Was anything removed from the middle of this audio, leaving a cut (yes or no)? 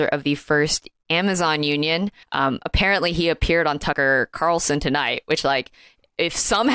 yes